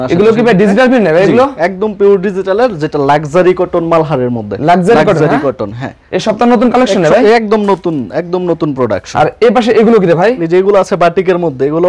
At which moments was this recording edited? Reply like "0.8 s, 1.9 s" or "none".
none